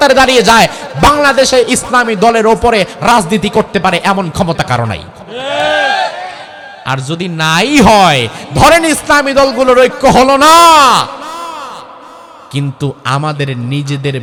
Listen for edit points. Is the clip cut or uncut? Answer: uncut